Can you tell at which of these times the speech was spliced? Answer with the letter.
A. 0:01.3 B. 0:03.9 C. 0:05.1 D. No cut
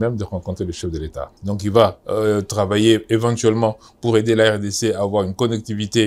A